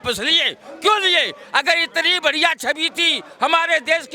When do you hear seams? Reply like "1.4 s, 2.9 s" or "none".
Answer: none